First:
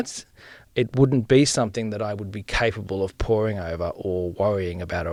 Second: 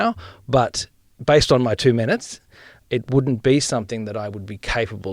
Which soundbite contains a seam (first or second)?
second